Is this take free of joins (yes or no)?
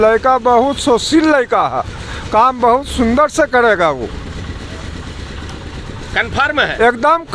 yes